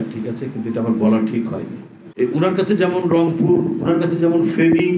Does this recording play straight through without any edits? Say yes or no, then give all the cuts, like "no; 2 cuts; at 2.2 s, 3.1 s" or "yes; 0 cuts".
no; 1 cut; at 2.1 s